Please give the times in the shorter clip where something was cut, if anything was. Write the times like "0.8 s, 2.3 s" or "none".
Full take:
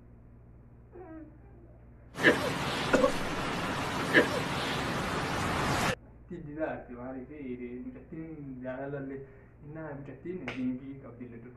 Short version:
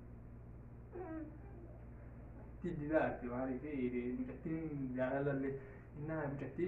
2.2 s

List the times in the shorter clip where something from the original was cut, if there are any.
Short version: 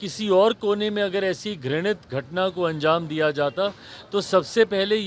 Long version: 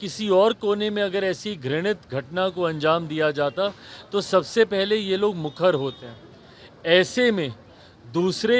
none

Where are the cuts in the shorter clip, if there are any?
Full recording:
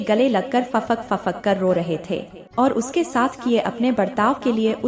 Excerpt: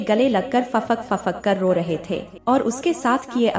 2.3 s

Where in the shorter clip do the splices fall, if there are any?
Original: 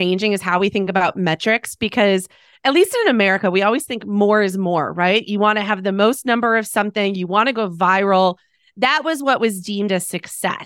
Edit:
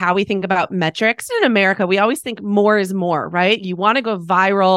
1.3 s, 3.6 s

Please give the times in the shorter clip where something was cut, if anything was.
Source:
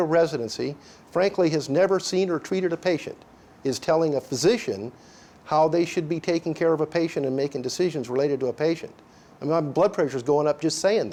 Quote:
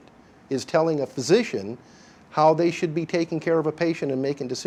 none

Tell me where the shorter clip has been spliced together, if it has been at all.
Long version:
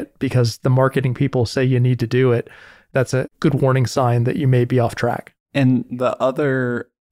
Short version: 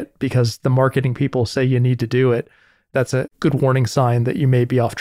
none

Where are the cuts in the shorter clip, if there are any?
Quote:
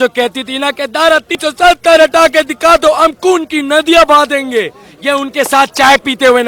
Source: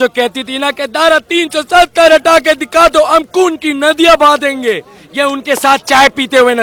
1.3 s

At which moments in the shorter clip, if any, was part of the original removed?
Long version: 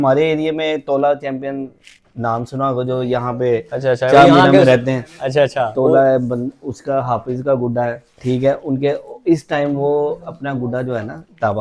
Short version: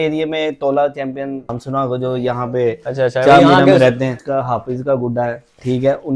1.6 s, 4.2 s

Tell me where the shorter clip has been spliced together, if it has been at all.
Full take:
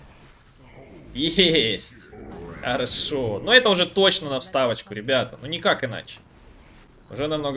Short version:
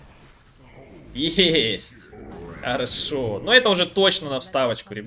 none

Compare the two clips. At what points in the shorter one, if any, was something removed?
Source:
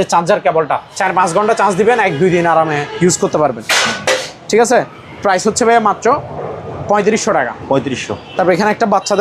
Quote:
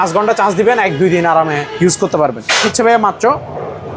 2.7 s

